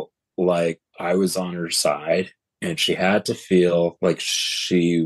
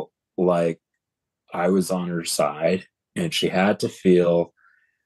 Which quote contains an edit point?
first; 2 cuts; at 0.9 s, 4.0 s

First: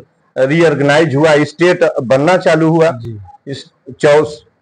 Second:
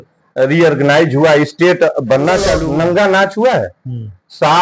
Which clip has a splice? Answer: second; 1 cut; at 2.6 s

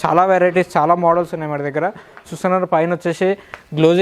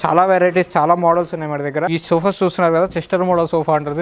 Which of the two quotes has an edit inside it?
second; 1 cut; at 1.9 s

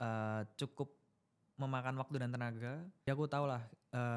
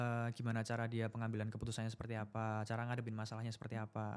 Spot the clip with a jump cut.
first; 1 cut; at 3.0 s

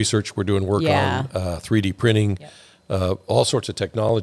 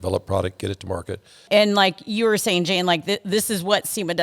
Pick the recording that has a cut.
second; 1 cut; at 1.4 s

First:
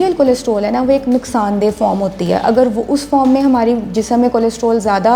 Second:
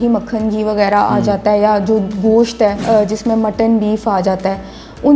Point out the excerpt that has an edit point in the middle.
second; 1 cut; at 2.8 s

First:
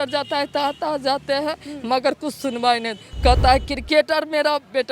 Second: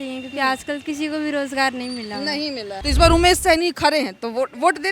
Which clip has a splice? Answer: second; 1 cut; at 2.8 s

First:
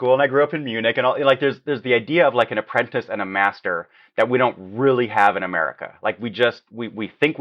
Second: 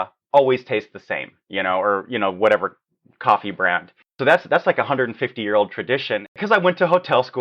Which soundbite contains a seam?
second; 1 cut; at 6.4 s

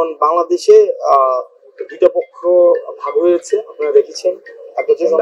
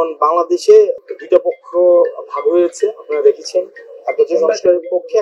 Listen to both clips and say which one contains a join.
second; 1 cut; at 1.0 s

